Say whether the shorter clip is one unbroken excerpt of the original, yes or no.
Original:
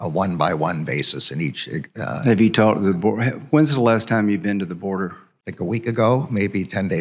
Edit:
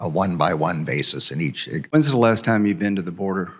no